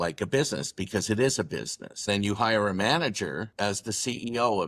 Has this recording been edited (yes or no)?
yes